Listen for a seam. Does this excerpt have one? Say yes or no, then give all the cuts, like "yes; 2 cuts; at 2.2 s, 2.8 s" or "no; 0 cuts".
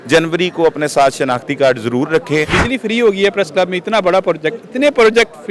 yes; 1 cut; at 2.5 s